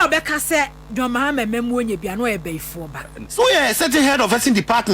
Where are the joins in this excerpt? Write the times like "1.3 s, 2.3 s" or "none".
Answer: 3.2 s